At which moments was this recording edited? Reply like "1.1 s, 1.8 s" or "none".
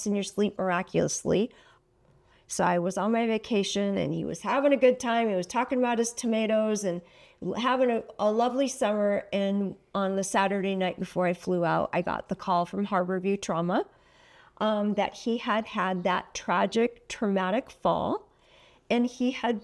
1.7 s